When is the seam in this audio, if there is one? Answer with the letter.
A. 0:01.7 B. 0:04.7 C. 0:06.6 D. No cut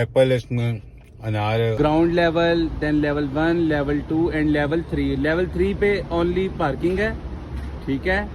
A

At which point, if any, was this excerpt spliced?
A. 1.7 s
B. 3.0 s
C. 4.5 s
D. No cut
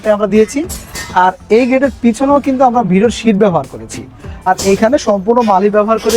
C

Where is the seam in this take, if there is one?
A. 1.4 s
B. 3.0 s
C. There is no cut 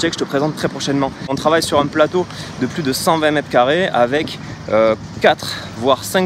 A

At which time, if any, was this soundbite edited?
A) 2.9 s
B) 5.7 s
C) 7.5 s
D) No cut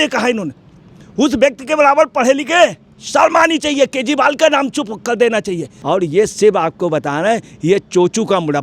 B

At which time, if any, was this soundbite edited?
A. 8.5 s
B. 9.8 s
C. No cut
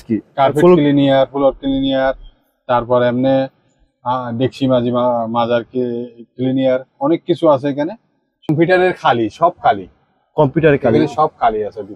A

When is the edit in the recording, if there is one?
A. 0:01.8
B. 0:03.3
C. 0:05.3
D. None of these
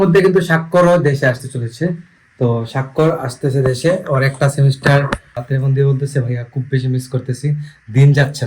C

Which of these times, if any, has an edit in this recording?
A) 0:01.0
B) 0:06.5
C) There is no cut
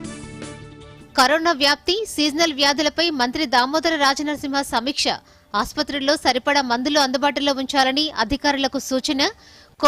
A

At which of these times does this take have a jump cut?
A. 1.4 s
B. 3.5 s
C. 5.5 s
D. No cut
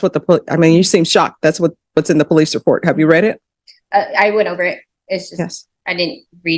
D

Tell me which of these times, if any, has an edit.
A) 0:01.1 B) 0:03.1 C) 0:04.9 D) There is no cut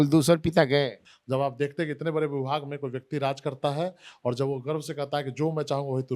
A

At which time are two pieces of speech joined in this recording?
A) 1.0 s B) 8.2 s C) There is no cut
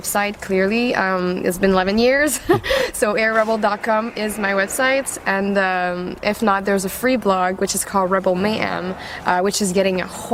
C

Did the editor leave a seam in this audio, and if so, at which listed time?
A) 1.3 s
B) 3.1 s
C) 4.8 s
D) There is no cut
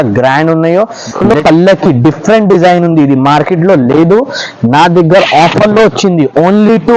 A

